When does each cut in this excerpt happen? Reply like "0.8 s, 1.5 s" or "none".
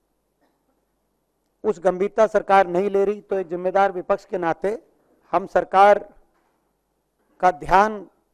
none